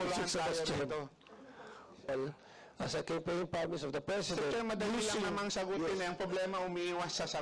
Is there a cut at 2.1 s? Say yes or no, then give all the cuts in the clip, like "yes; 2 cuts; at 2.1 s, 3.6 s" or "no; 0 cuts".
yes; 1 cut; at 2.1 s